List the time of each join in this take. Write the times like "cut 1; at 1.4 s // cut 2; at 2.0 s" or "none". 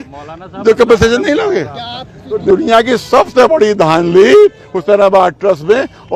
cut 1; at 2.4 s